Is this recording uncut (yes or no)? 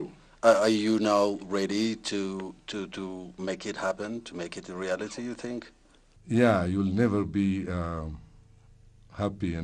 yes